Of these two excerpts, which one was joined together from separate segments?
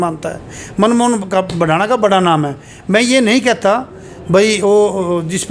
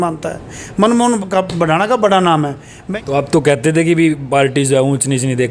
second; 1 cut; at 2.8 s

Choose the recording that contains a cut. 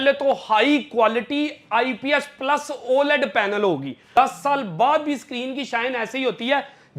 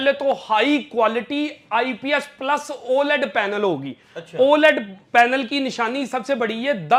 first; 1 cut; at 4.1 s

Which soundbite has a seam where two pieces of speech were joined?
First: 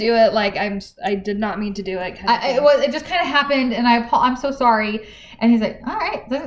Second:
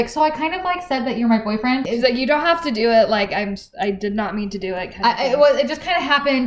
second; 1 cut; at 1.8 s

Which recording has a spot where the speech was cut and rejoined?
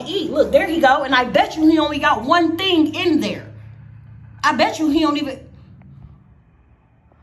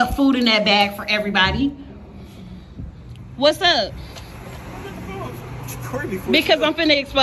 first; 1 cut; at 1.9 s

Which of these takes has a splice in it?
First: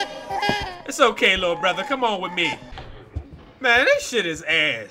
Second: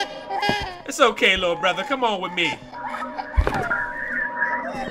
first; 1 cut; at 2.7 s

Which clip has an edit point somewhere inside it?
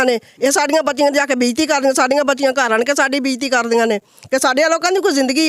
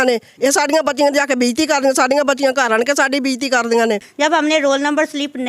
second; 1 cut; at 4.1 s

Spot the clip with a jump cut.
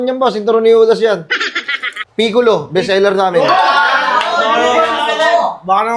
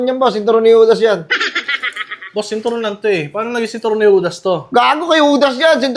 first; 1 cut; at 2.0 s

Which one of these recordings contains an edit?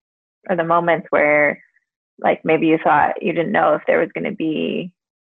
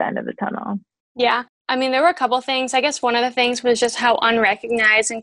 second; 1 cut; at 1.5 s

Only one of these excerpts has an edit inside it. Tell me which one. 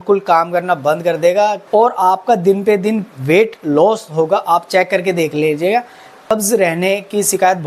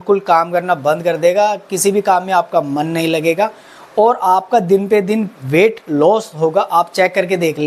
first; 2 cuts; at 1.6 s, 6.3 s

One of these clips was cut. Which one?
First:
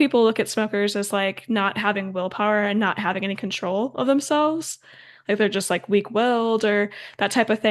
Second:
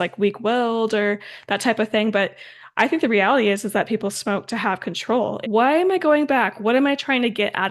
second; 1 cut; at 5.4 s

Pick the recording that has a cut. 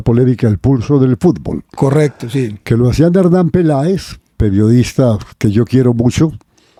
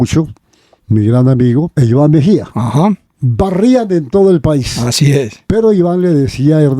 second; 2 cuts; at 1.7 s, 3.2 s

